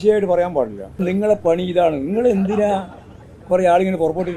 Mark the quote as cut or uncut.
cut